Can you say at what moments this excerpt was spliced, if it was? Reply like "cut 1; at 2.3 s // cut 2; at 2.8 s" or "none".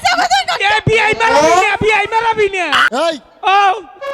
cut 1; at 2.8 s